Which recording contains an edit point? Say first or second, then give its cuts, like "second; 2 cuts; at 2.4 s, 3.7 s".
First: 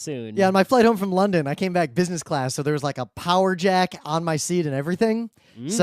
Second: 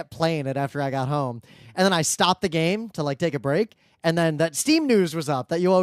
first; 1 cut; at 2.5 s